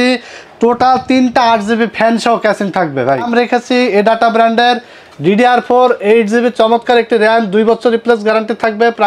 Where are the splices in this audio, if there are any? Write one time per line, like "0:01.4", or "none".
0:03.3